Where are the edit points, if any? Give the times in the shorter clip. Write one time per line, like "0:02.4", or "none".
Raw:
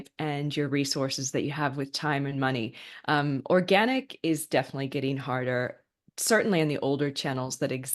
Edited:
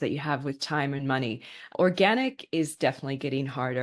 0:01.7